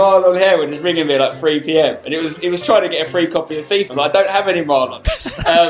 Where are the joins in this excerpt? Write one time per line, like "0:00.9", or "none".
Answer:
0:03.9